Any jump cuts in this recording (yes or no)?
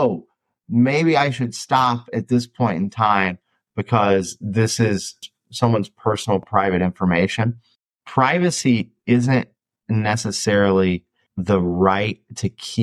yes